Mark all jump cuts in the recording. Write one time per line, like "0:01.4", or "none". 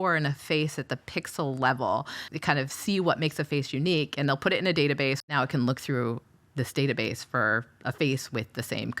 0:02.3
0:05.3